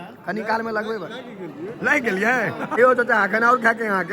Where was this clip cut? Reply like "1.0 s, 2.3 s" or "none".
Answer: 2.8 s